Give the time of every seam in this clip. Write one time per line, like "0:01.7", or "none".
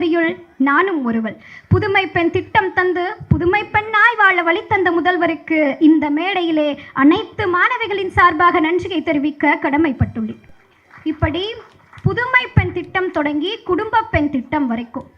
none